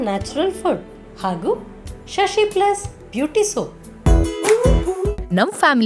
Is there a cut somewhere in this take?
yes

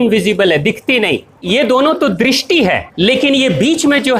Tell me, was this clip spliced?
yes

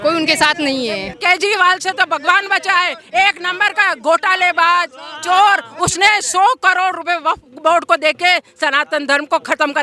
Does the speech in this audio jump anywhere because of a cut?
yes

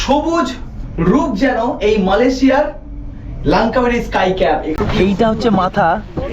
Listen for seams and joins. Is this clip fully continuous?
no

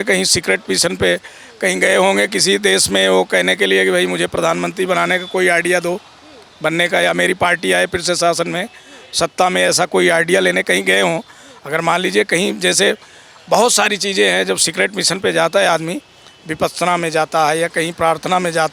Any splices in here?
no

